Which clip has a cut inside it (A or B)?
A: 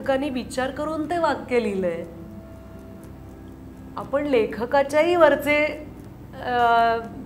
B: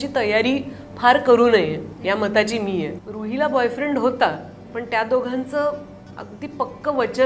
B